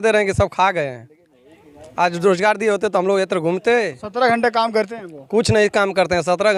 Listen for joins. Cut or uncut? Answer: uncut